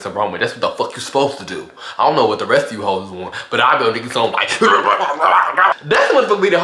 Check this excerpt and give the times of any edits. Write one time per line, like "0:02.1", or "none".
0:05.7